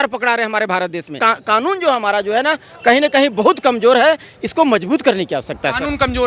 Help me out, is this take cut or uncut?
uncut